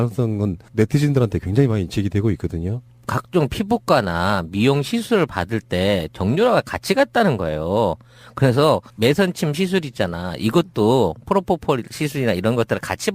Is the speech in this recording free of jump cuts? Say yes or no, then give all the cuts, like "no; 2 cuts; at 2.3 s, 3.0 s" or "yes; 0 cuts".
no; 1 cut; at 7.5 s